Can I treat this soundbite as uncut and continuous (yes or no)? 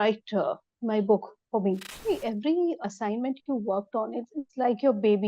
no